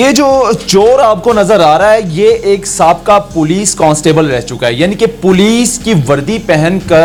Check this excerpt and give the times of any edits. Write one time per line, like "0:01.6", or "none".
none